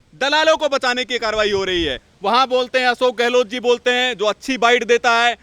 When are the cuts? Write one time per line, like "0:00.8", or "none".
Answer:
0:02.1